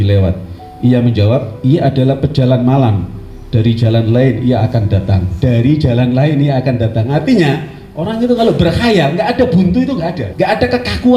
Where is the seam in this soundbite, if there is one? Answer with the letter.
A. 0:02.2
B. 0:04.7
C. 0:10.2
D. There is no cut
C